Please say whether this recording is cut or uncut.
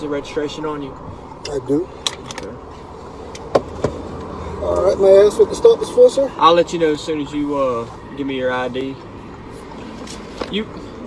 uncut